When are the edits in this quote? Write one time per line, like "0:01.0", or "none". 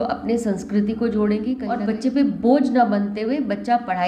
0:01.6